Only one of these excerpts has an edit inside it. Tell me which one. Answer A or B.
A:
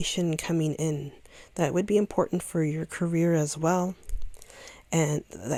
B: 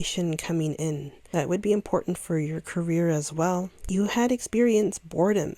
B